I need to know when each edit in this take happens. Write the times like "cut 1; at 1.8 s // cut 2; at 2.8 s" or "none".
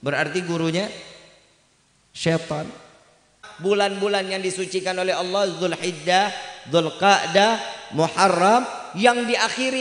cut 1; at 3.4 s